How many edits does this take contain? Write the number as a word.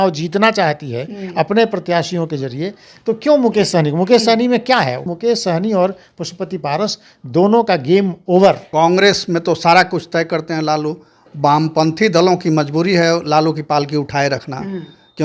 two